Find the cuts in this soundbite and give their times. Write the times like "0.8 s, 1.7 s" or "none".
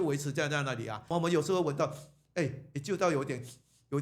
1.1 s